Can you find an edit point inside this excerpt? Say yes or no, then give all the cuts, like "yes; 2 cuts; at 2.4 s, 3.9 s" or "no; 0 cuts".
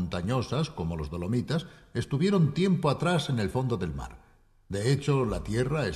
yes; 1 cut; at 4.4 s